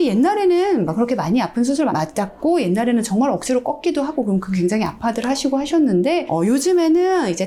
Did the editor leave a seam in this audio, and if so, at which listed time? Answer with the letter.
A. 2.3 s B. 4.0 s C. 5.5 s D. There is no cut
D